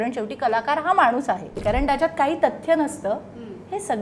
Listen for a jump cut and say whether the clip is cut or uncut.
cut